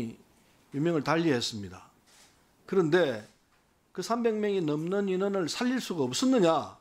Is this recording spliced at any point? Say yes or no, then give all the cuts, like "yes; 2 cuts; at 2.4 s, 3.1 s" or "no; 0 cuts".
no; 0 cuts